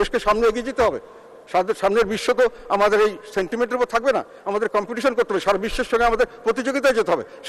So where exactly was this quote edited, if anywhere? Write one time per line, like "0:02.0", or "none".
none